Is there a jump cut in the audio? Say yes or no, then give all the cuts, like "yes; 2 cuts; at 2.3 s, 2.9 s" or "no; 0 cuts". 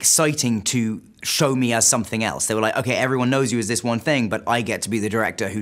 no; 0 cuts